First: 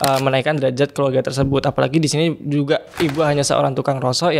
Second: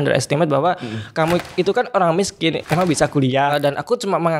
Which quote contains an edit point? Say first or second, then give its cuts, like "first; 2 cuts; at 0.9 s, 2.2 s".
second; 2 cuts; at 2.6 s, 3.5 s